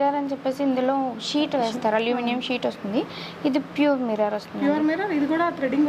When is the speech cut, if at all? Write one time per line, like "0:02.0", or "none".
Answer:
none